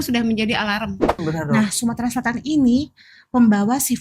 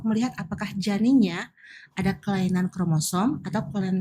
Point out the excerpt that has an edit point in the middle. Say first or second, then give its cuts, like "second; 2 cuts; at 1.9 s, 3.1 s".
first; 1 cut; at 1.2 s